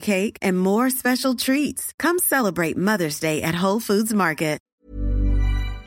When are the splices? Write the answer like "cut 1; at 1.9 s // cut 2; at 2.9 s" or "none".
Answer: cut 1; at 4.6 s